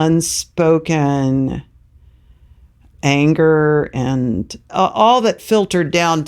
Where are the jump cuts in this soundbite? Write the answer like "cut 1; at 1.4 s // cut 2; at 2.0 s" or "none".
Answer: cut 1; at 2.9 s // cut 2; at 4.7 s

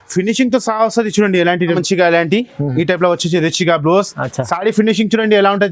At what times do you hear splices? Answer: cut 1; at 1.8 s

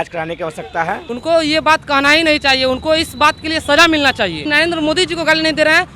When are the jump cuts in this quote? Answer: cut 1; at 1.1 s // cut 2; at 4.4 s

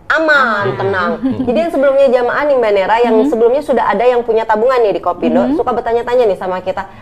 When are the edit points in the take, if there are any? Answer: cut 1; at 1.6 s

